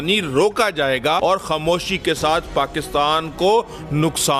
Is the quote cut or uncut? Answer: cut